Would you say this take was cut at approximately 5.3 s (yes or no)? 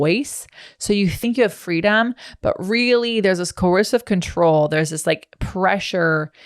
no